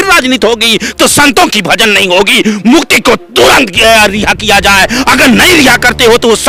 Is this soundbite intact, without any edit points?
yes; 0 cuts

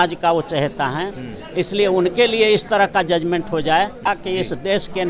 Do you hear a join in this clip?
yes; 1 cut; at 4.1 s

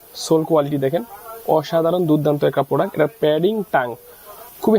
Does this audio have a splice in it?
no; 0 cuts

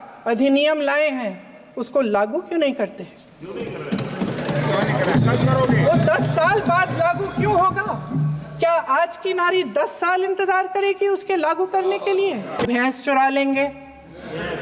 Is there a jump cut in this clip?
yes; 1 cut; at 12.7 s

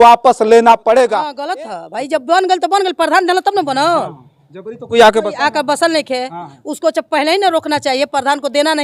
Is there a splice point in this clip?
yes; 1 cut; at 1.4 s

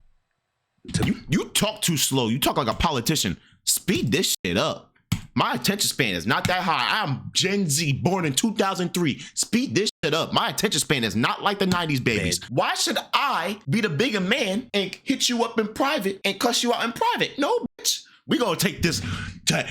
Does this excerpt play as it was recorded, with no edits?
no; 4 cuts; at 12.4 s, 13.6 s, 14.7 s, 16.2 s

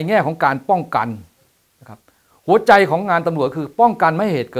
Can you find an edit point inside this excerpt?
no; 0 cuts

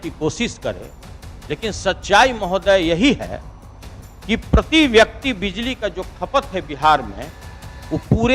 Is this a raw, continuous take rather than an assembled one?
yes; 0 cuts

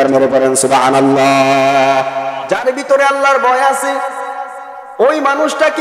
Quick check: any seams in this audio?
yes; 1 cut; at 2.4 s

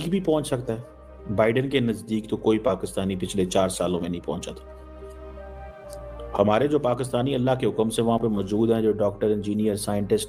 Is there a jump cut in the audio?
no; 0 cuts

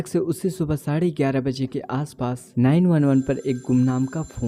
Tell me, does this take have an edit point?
yes; 1 cut; at 2.4 s

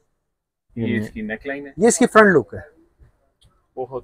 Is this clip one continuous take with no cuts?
no; 1 cut; at 1.6 s

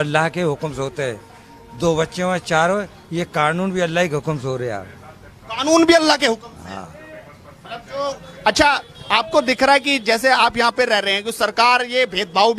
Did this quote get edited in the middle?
no; 0 cuts

